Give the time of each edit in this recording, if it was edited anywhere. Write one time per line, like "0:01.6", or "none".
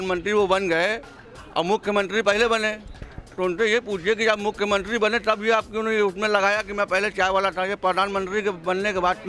none